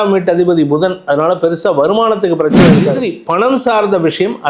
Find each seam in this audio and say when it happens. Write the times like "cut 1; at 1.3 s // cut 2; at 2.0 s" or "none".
cut 1; at 3.0 s